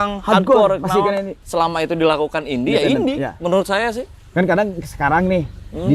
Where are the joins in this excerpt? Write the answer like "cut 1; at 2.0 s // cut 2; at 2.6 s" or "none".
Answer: cut 1; at 1.4 s